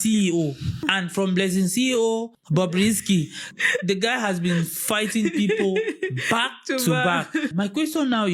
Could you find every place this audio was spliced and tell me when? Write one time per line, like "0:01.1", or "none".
0:00.9
0:02.4
0:03.6
0:07.5